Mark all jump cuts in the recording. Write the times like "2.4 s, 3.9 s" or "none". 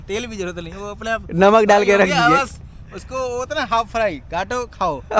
none